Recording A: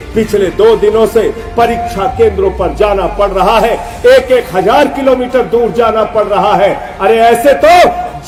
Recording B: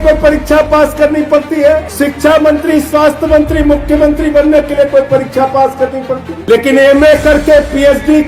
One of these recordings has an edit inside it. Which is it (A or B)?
B